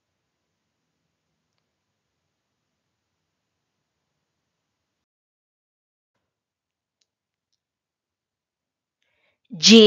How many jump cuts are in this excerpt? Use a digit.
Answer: 0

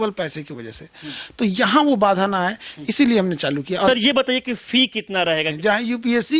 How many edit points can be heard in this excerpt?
2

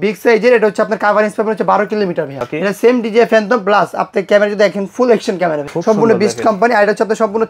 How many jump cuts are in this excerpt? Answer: 2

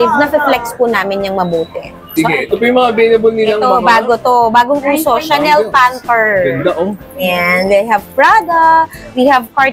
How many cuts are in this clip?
1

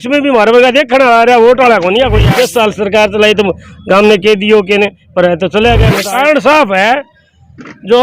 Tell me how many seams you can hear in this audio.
2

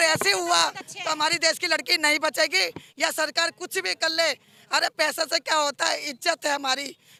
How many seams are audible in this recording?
0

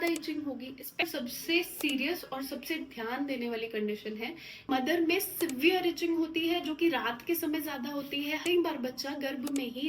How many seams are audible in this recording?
3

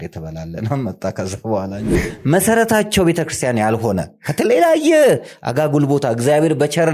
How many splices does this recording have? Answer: 1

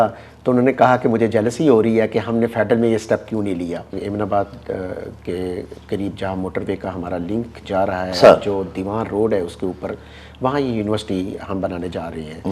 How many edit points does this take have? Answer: 1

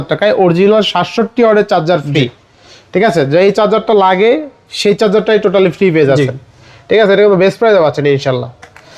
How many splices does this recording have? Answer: 0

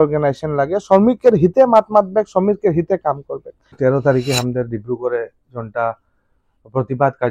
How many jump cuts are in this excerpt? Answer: 1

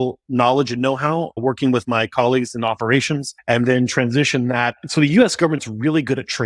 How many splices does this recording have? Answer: 3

